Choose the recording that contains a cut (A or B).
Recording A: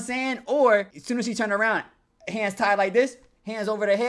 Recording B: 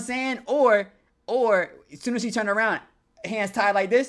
A